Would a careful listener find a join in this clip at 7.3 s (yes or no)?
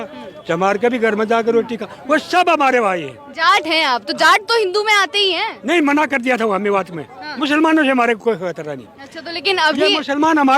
yes